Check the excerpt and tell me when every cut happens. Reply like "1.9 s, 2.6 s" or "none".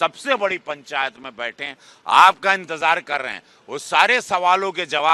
none